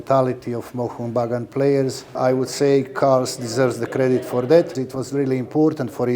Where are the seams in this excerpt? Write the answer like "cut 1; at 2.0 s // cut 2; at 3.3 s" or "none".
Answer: cut 1; at 2.1 s // cut 2; at 4.8 s